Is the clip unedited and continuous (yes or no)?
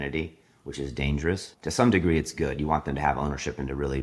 no